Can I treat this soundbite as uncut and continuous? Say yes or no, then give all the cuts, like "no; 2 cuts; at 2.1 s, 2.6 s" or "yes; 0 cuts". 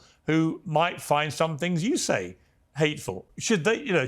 no; 1 cut; at 3.1 s